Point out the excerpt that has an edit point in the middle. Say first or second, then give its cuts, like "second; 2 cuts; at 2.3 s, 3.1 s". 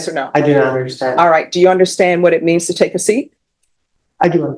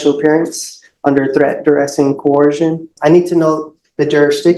second; 1 cut; at 2.9 s